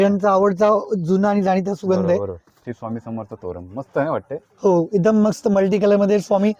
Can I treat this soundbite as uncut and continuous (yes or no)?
no